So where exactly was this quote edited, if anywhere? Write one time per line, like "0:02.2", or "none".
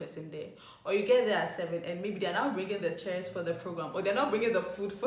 none